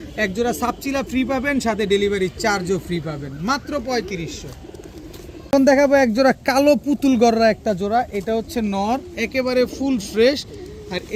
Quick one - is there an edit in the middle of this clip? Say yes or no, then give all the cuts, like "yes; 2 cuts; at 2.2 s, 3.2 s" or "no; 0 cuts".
no; 0 cuts